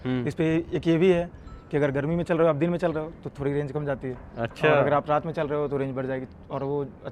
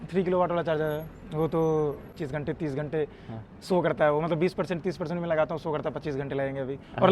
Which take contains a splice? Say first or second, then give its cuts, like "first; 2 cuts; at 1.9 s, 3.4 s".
second; 1 cut; at 2.1 s